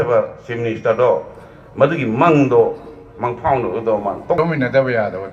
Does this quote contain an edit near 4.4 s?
yes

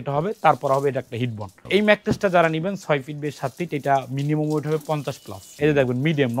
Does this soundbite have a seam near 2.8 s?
no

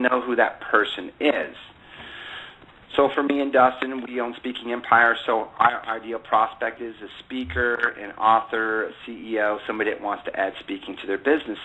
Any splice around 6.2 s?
no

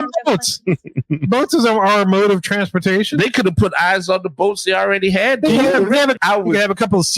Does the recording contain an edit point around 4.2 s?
no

